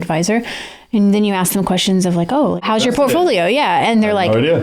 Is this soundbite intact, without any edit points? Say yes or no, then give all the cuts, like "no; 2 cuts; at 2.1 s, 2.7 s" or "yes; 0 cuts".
no; 1 cut; at 2.6 s